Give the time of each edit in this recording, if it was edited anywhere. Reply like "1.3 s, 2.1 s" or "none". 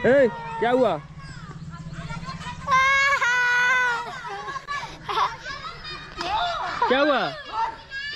none